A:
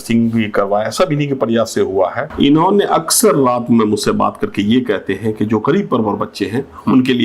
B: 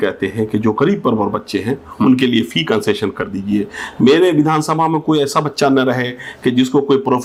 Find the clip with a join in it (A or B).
A